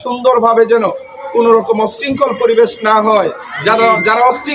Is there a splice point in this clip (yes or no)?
no